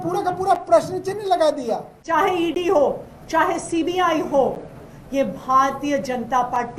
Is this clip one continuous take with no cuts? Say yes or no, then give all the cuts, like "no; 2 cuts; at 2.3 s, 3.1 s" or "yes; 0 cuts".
no; 1 cut; at 1.9 s